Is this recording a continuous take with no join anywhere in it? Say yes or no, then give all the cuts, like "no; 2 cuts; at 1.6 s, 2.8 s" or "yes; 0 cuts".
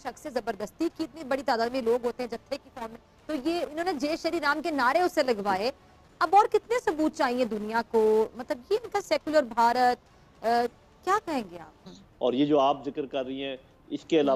yes; 0 cuts